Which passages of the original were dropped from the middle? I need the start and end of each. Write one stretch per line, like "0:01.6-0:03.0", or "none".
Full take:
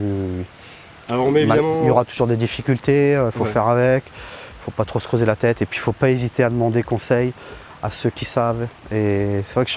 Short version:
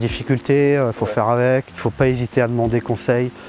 0:04.1-0:05.7

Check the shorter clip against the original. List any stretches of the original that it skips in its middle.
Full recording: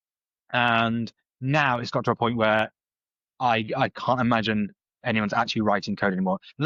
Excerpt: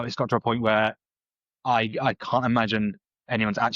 none

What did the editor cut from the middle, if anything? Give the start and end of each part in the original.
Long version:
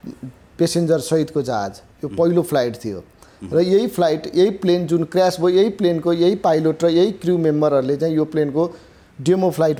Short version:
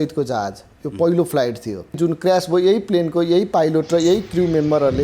0:03.1-0:04.8

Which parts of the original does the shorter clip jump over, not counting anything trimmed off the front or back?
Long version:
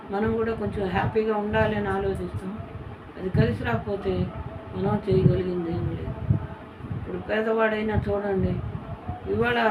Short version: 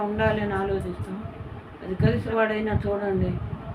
0:03.7-0:07.5

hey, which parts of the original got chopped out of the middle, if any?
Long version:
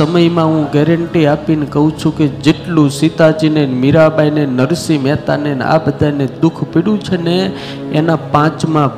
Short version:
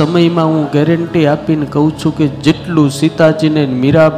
none

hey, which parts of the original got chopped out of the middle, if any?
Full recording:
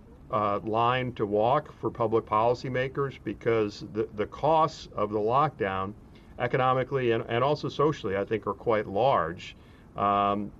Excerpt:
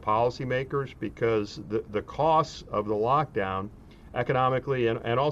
none

